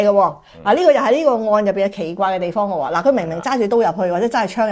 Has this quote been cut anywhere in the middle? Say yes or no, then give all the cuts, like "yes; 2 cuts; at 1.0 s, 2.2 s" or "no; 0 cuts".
no; 0 cuts